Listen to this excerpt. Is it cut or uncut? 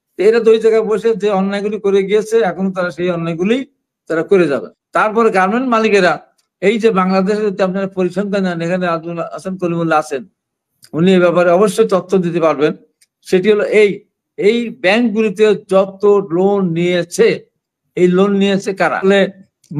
cut